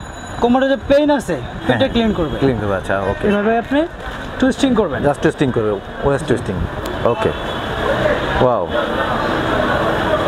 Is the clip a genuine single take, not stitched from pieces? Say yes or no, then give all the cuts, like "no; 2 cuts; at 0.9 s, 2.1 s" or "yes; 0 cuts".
yes; 0 cuts